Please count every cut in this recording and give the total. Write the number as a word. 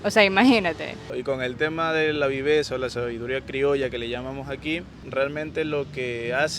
two